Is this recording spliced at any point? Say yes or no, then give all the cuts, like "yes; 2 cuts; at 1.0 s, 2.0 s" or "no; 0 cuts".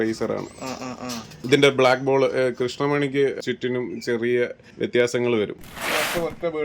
yes; 4 cuts; at 1.3 s, 3.4 s, 4.6 s, 5.6 s